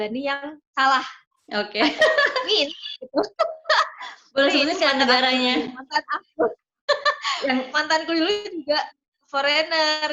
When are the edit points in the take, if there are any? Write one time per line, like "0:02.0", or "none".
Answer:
none